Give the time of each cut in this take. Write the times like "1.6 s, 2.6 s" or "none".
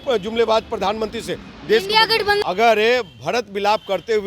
2.4 s